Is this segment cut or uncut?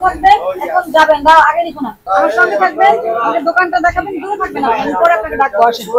uncut